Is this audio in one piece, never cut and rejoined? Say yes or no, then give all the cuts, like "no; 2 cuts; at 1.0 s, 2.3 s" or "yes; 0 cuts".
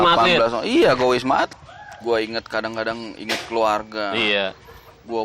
no; 1 cut; at 1.5 s